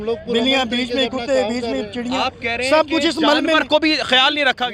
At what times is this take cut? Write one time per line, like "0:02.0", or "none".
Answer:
none